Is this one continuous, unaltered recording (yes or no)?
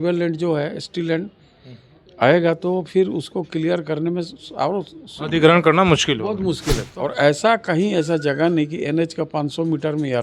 no